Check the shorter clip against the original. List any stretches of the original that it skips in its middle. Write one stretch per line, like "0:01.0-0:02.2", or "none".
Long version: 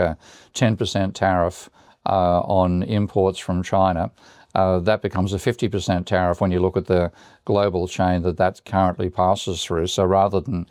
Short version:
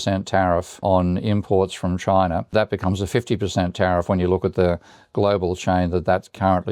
0:01.7-0:02.5
0:04.1-0:04.8